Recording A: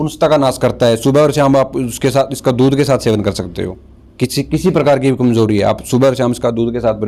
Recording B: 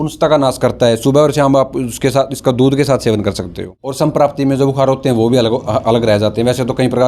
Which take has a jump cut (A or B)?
B